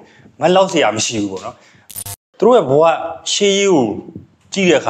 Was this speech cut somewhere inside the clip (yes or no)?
yes